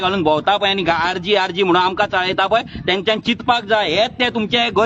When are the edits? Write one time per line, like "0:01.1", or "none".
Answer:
none